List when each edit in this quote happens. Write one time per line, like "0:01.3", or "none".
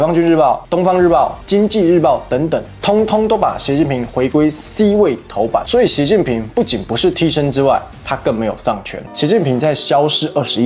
0:05.7
0:09.0